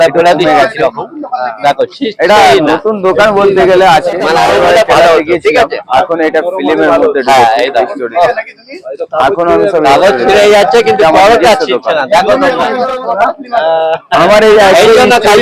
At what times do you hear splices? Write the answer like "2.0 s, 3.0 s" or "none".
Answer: 4.4 s, 12.8 s